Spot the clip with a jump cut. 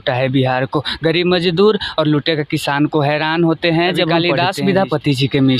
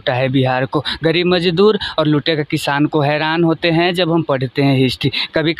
first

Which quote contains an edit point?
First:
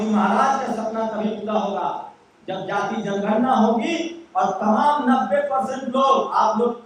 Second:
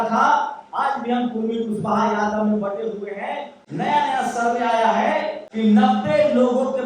second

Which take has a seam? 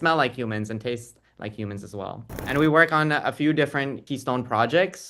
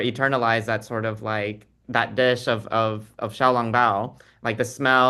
first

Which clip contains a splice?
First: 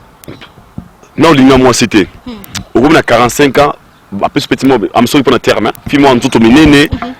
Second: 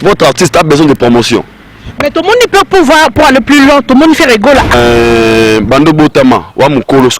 second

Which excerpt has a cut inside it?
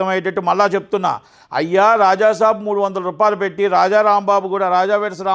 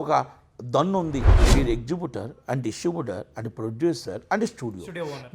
second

